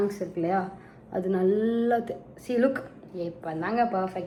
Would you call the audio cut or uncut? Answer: uncut